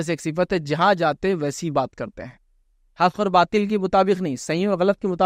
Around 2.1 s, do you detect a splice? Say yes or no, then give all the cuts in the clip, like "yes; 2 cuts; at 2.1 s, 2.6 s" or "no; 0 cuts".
no; 0 cuts